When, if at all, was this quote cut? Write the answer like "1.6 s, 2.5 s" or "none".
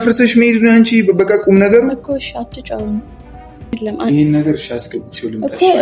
3.7 s